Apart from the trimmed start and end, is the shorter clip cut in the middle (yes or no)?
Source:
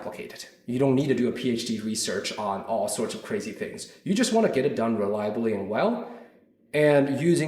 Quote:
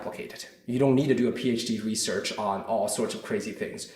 no